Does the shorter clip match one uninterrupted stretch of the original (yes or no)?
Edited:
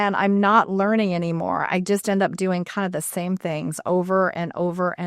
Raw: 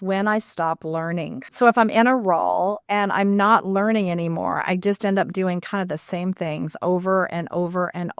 yes